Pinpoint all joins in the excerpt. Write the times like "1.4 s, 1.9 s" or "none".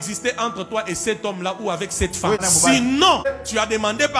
2.4 s, 3.3 s